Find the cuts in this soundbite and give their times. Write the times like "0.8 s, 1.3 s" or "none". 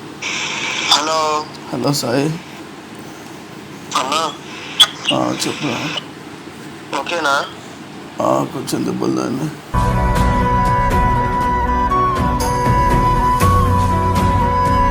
none